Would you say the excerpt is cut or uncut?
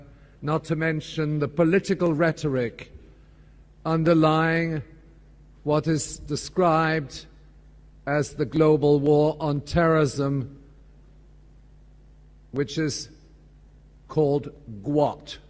cut